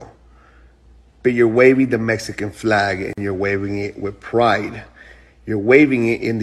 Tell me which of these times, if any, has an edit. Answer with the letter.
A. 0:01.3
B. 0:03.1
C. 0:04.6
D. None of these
B